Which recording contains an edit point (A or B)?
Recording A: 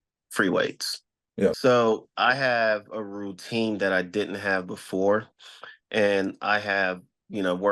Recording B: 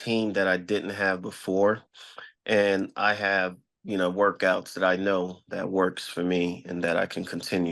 A